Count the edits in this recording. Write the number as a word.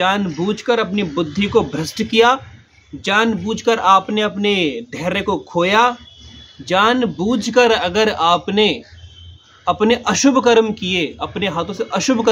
zero